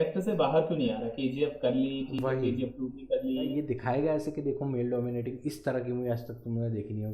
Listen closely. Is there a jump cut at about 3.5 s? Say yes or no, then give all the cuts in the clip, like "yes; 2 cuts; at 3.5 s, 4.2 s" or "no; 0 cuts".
yes; 1 cut; at 3.5 s